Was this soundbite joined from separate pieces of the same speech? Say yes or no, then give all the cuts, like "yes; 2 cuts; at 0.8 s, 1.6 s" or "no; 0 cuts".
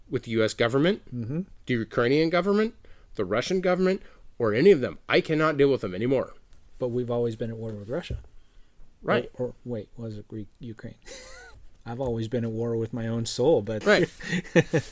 yes; 2 cuts; at 11.5 s, 13.7 s